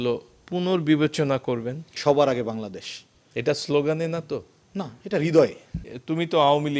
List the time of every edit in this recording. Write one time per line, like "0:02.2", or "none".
0:01.9
0:05.8